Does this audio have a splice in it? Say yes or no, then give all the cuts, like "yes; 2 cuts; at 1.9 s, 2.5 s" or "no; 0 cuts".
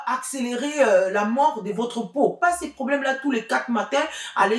yes; 1 cut; at 2.4 s